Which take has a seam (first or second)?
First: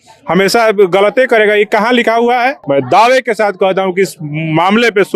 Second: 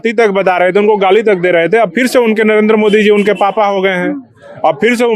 first